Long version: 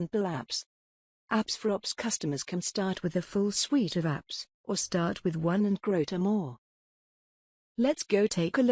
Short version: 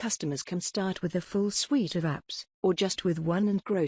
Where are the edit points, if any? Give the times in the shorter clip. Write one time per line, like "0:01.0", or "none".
0:02.9